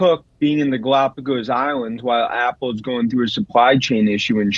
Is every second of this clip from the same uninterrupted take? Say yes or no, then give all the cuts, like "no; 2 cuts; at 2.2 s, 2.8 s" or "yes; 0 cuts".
yes; 0 cuts